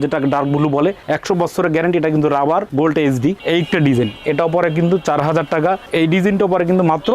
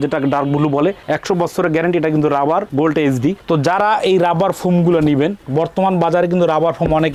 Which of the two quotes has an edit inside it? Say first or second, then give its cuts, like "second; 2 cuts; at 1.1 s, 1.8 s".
first; 2 cuts; at 3.4 s, 5.8 s